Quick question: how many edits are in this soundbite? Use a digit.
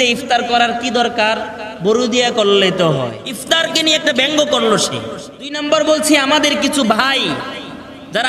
2